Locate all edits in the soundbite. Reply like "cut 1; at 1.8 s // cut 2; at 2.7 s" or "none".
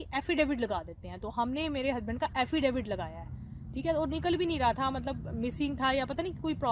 none